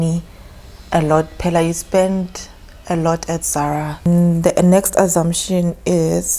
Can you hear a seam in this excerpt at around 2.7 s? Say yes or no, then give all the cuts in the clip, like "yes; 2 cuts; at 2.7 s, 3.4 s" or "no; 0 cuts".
no; 1 cut; at 4.1 s